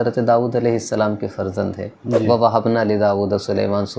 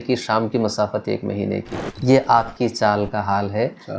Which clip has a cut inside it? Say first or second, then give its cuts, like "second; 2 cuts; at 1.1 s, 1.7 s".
second; 1 cut; at 2.0 s